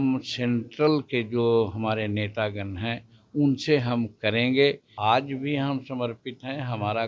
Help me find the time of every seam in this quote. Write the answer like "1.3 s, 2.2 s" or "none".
4.9 s